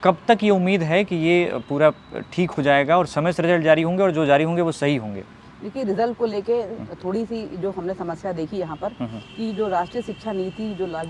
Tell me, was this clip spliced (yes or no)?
no